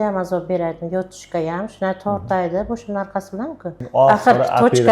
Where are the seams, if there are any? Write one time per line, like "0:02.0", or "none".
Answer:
0:03.8